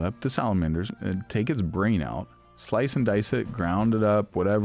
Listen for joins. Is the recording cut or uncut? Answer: cut